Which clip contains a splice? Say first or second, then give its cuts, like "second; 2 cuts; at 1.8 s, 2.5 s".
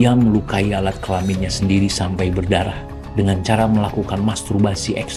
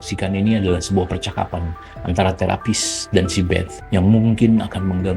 second; 1 cut; at 3.8 s